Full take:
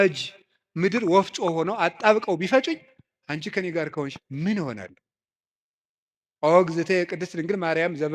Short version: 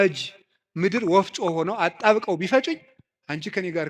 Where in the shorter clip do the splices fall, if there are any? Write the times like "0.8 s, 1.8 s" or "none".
none

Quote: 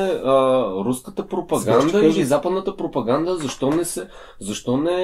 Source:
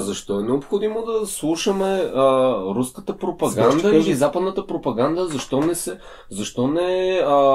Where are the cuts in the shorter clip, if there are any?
none

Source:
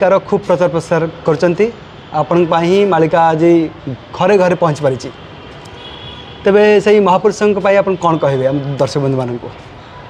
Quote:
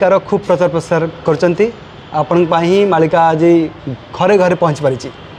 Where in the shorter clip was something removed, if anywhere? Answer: none

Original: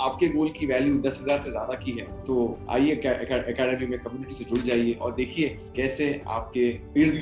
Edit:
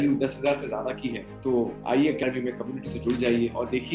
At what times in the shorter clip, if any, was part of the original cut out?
2.2 s

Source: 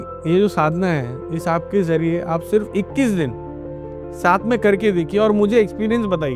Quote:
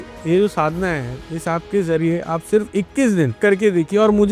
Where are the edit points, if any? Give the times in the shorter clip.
3.4 s

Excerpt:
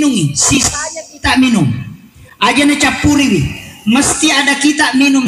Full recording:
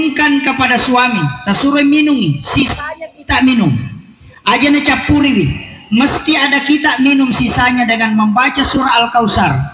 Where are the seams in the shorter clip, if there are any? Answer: none

